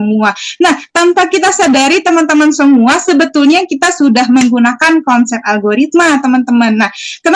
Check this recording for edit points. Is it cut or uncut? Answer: uncut